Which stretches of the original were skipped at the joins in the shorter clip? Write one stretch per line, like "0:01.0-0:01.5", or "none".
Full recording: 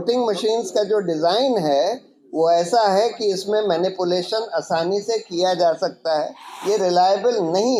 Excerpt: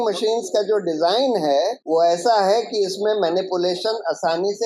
0:02.0-0:02.3